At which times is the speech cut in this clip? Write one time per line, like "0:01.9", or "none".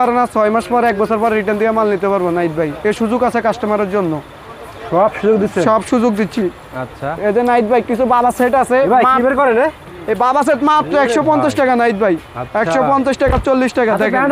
none